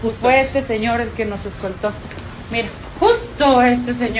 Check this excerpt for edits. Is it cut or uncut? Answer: uncut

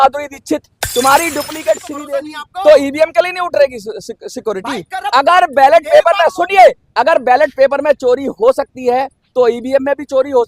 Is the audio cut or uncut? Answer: cut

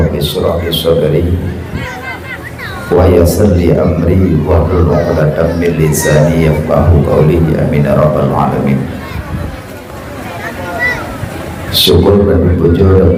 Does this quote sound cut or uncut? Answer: uncut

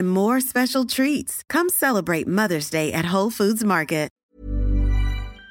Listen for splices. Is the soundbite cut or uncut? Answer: cut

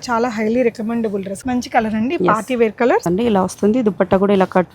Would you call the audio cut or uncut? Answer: cut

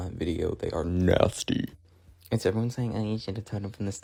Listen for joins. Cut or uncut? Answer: uncut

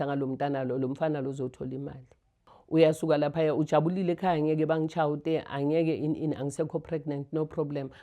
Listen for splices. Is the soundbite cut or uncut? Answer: cut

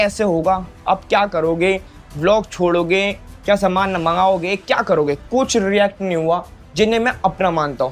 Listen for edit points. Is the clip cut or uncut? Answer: uncut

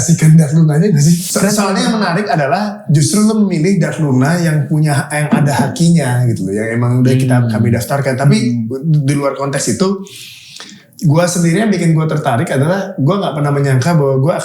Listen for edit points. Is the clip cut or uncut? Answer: cut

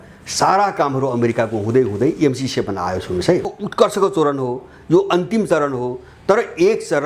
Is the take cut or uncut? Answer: cut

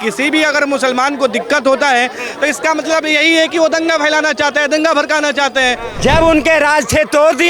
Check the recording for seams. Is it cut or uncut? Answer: cut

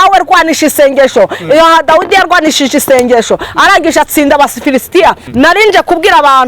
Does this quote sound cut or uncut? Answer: cut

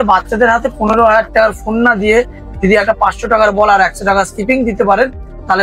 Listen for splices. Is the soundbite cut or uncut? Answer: uncut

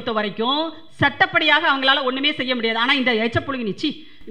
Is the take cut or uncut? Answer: uncut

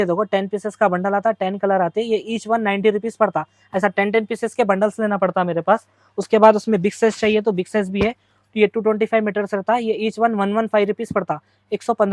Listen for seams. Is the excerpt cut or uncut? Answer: uncut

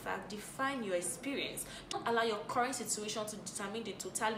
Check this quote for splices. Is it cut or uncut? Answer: uncut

